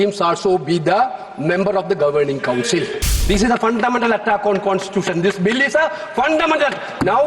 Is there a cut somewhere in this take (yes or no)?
yes